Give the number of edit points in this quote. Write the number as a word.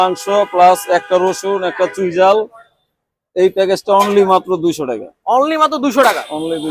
zero